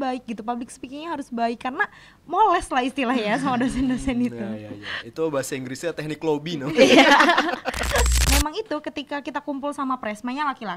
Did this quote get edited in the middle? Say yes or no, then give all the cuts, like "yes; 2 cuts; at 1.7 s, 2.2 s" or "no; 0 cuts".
yes; 1 cut; at 8.1 s